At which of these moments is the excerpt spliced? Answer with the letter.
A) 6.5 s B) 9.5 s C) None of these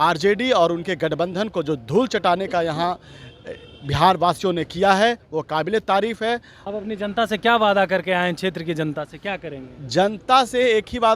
A